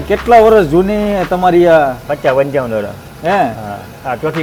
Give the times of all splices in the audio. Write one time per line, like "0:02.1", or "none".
none